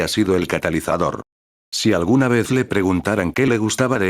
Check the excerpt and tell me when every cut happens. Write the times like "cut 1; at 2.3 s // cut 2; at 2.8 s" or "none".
cut 1; at 1.3 s